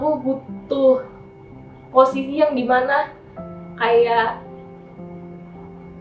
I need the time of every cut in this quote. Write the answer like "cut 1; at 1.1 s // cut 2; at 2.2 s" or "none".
none